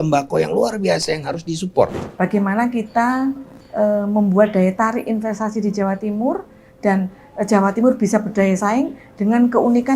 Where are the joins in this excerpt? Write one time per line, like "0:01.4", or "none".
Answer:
0:02.0